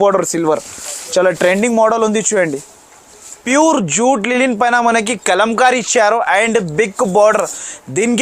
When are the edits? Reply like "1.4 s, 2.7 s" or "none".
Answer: 3.4 s